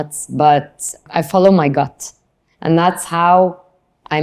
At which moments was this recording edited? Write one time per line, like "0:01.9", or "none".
0:01.0